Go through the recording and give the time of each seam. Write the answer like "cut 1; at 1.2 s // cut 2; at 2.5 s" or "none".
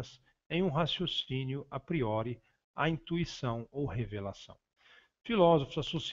cut 1; at 5.2 s